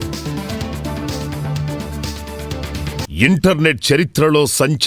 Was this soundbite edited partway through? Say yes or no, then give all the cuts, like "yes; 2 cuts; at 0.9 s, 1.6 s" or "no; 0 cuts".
yes; 1 cut; at 3.1 s